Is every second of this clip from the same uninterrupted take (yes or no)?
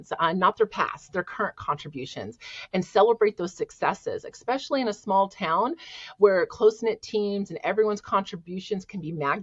yes